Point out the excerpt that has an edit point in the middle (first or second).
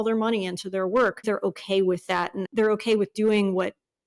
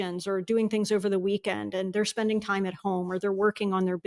first